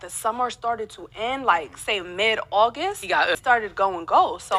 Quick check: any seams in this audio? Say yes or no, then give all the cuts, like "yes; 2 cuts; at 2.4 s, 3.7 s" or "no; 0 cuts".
yes; 1 cut; at 3.4 s